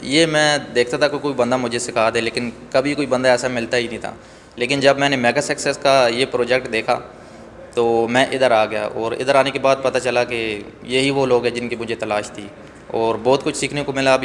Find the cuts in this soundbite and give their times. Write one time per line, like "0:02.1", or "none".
none